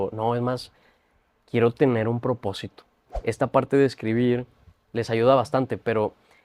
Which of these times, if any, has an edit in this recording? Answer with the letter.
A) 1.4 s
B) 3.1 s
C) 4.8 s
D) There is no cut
B